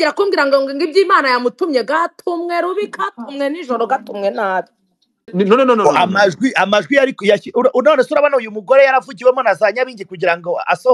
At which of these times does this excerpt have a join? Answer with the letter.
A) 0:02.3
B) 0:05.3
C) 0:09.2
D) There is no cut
B